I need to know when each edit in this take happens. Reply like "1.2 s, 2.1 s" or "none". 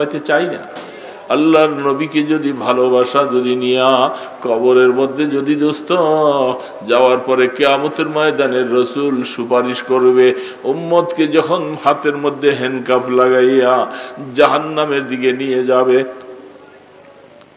1.1 s